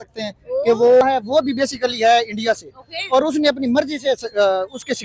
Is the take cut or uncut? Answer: cut